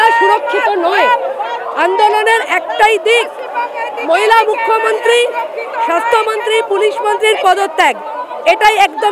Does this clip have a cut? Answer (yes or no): no